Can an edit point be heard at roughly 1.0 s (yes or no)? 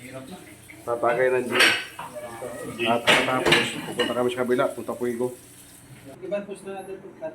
no